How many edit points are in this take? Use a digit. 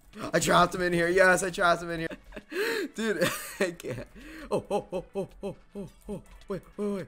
1